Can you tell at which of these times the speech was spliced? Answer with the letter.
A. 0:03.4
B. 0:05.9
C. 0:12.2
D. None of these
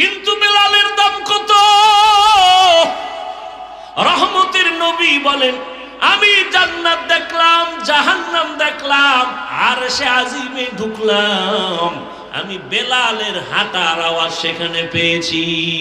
D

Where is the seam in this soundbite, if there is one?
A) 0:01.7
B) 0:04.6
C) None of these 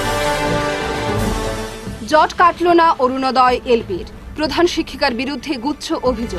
A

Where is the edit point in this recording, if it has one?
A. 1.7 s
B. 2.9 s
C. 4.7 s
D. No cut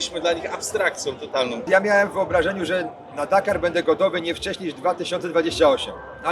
A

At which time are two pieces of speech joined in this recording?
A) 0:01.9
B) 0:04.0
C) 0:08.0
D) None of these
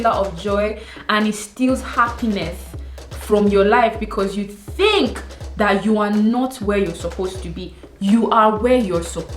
D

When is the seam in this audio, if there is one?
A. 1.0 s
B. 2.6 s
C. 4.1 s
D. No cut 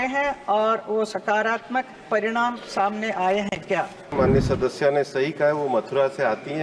C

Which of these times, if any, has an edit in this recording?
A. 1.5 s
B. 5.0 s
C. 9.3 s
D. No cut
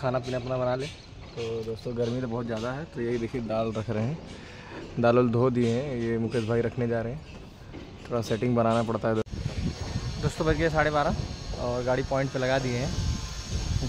C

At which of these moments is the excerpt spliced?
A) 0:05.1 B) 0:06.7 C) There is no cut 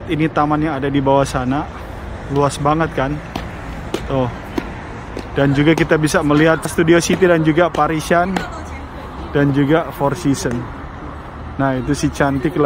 B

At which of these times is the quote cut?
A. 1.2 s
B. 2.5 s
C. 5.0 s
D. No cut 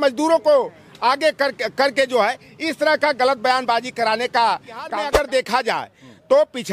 C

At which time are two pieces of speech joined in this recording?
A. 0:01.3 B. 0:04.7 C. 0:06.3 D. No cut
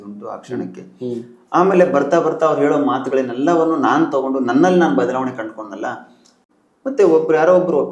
C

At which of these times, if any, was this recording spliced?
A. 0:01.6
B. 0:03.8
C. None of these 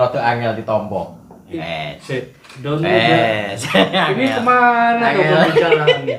A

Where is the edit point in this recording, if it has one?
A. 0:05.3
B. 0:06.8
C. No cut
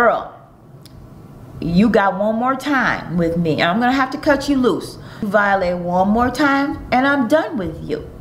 A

